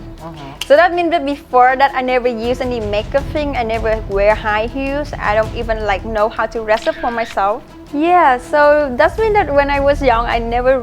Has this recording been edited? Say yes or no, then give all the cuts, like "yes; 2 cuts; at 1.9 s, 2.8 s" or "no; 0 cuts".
no; 0 cuts